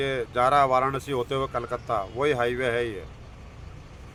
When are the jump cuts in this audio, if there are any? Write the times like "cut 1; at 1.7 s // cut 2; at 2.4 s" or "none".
none